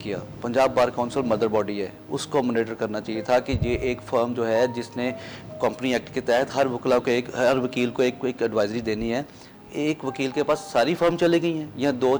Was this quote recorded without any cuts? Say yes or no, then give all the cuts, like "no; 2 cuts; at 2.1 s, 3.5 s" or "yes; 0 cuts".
yes; 0 cuts